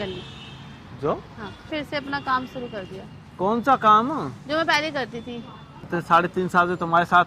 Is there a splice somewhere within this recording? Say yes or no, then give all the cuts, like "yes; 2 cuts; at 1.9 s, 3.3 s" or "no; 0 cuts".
yes; 2 cuts; at 1.7 s, 5.9 s